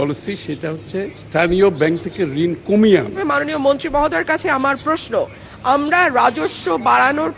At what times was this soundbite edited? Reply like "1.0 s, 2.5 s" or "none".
1.2 s, 3.2 s

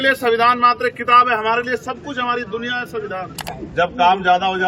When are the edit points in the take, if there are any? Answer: 3.5 s

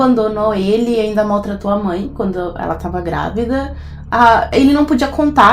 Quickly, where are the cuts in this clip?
none

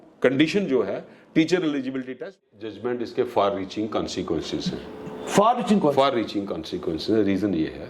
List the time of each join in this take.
2.3 s

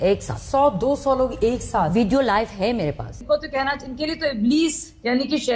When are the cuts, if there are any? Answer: 3.2 s

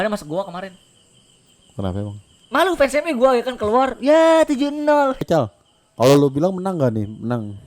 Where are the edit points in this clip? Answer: 5.2 s

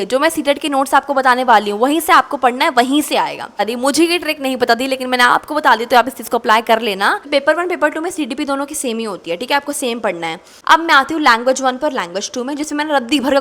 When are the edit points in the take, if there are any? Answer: 3.6 s, 7.2 s, 10.5 s

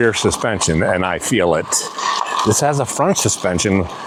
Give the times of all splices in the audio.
none

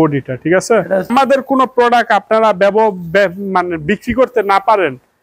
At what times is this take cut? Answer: 1.1 s

